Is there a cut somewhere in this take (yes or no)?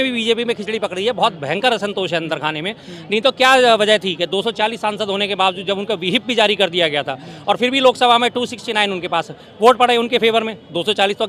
no